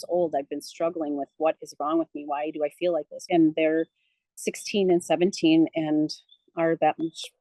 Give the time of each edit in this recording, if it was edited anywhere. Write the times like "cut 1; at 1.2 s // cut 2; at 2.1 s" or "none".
cut 1; at 3.2 s